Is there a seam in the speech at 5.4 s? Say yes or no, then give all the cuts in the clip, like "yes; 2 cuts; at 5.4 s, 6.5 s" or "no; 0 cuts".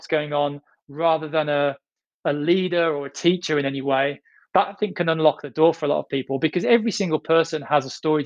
no; 0 cuts